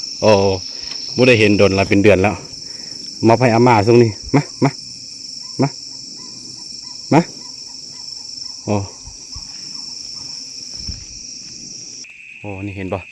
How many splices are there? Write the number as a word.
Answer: one